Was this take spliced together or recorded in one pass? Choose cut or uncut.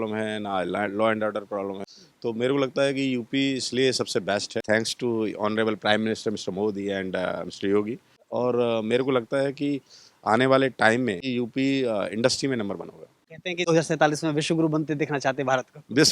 cut